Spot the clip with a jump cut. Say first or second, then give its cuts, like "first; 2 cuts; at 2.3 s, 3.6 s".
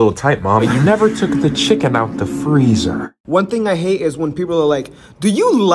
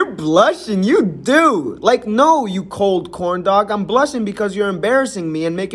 first; 1 cut; at 3.2 s